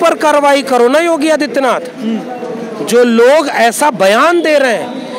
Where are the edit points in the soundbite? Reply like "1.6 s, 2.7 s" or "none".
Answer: none